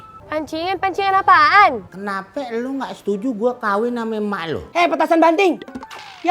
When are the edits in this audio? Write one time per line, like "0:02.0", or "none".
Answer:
0:01.9
0:04.6